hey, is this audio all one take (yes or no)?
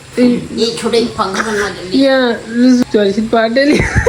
no